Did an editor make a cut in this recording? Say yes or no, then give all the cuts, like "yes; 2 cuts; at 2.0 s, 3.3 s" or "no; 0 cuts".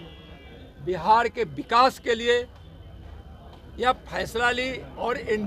no; 0 cuts